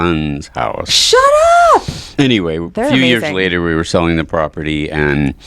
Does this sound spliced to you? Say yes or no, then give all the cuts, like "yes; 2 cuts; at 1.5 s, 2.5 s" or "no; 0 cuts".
yes; 1 cut; at 2.0 s